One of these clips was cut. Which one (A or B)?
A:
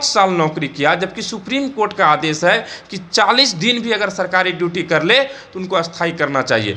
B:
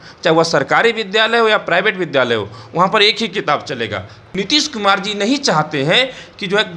B